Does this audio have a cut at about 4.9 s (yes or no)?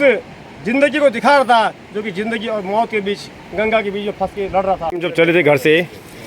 yes